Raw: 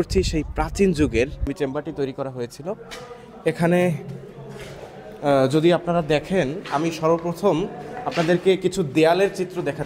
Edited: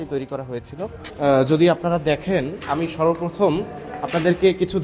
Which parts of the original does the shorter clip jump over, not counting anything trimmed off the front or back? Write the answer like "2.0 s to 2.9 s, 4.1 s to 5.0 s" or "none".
2.9 s to 5.1 s